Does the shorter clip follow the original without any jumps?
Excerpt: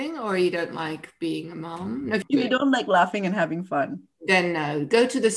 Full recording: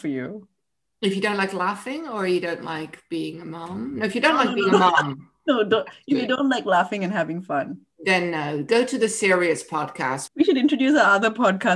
no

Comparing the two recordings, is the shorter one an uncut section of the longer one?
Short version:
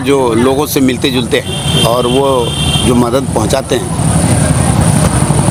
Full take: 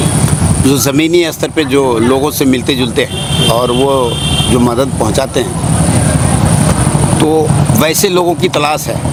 yes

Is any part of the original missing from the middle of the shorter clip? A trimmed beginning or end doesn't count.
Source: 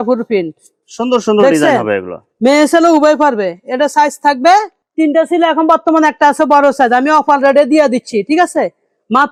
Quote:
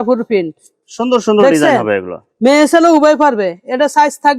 no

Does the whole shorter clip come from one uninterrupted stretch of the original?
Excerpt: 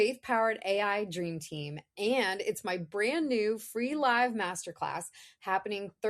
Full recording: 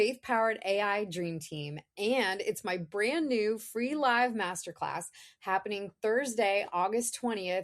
yes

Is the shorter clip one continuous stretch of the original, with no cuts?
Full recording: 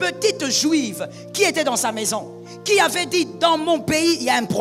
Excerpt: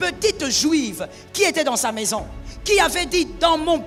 yes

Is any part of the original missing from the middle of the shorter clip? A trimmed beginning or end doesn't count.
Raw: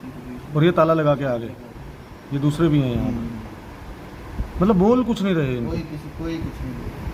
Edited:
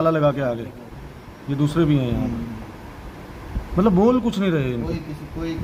no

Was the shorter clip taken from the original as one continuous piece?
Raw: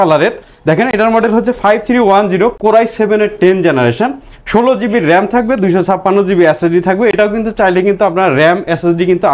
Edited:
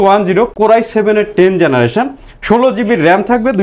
yes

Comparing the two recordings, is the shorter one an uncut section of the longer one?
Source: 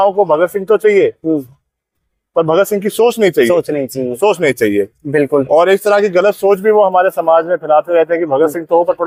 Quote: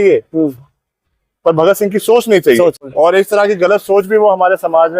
no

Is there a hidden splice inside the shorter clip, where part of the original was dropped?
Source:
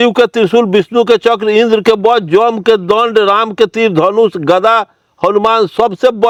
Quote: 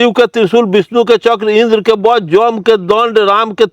no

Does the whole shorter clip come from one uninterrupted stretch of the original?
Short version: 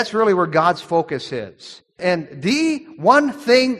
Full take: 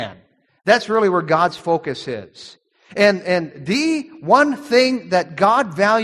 no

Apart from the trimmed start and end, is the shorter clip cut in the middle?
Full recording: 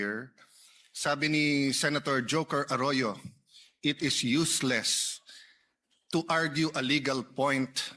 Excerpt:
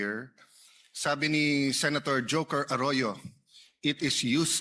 no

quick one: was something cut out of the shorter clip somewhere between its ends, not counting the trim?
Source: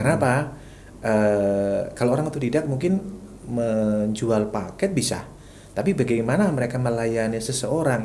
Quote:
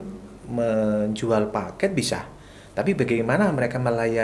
no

